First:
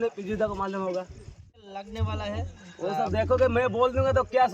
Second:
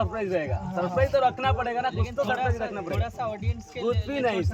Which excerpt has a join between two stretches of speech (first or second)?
first